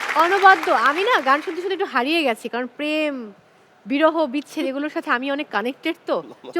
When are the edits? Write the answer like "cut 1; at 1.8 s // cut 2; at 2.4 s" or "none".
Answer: none